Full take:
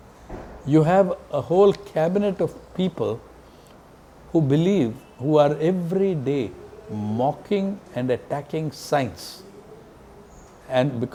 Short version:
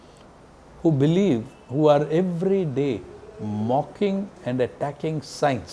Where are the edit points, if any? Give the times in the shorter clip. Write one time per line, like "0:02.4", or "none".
none